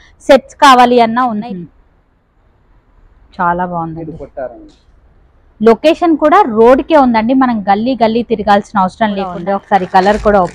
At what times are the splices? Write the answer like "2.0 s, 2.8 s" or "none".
1.3 s, 9.4 s